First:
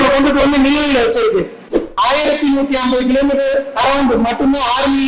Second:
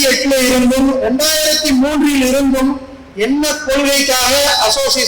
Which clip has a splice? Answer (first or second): first